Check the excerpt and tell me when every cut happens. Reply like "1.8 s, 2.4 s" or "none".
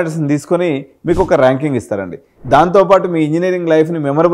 2.3 s